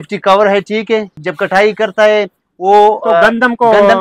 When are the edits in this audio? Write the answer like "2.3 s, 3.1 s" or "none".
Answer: 1.2 s